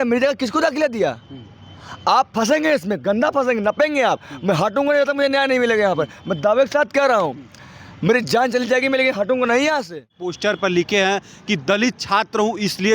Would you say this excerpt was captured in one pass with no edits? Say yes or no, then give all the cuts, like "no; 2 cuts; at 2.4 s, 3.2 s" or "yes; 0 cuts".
no; 1 cut; at 10.3 s